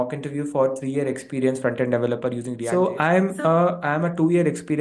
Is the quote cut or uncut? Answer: cut